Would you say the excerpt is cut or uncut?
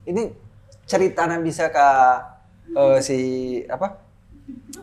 uncut